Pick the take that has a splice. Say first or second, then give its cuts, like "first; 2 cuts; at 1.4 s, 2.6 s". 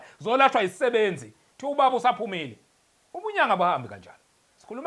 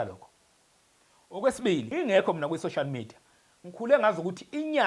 second; 1 cut; at 1.9 s